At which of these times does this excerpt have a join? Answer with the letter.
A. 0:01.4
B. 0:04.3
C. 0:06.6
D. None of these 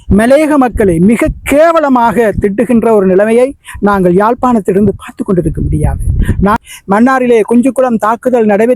C